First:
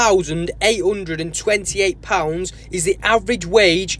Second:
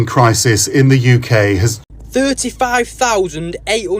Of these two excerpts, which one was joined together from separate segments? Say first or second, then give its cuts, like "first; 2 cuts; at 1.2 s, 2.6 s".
second; 1 cut; at 1.7 s